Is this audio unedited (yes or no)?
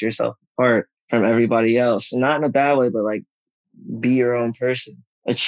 yes